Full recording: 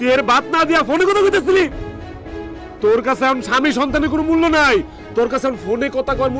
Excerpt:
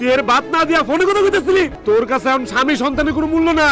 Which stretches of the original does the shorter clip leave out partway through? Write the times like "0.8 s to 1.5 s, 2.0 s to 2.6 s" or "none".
1.8 s to 2.7 s